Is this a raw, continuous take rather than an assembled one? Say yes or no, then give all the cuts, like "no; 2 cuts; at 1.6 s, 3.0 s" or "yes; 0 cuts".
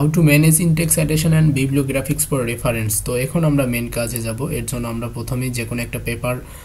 yes; 0 cuts